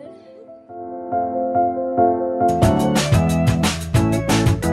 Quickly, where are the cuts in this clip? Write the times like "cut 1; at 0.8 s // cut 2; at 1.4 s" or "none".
cut 1; at 2.7 s